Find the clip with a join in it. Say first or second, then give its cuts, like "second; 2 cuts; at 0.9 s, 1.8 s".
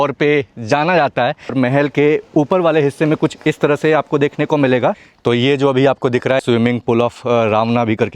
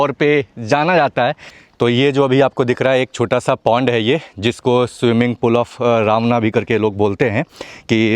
first; 3 cuts; at 1.5 s, 5.1 s, 6.4 s